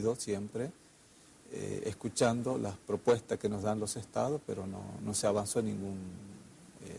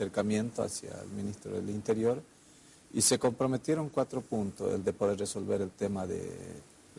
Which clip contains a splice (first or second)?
first